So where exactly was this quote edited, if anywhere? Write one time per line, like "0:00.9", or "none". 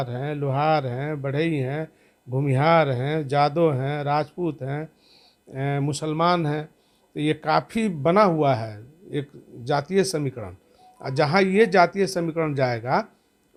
none